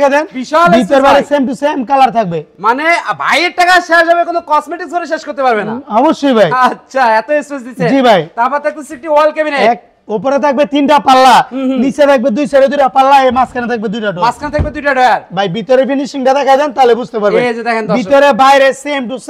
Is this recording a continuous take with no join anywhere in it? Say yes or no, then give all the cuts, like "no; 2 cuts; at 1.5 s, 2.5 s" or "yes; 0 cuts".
yes; 0 cuts